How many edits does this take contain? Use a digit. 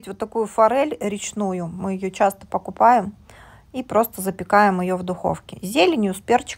0